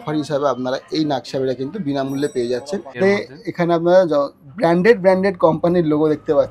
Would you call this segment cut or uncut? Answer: cut